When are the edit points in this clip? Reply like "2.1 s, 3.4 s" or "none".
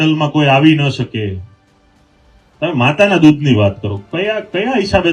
none